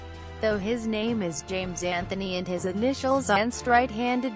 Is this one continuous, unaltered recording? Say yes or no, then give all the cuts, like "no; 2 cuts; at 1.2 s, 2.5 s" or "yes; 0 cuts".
yes; 0 cuts